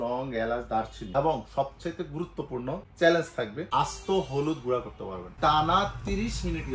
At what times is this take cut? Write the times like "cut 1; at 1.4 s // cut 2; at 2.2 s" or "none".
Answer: cut 1; at 3.7 s // cut 2; at 5.3 s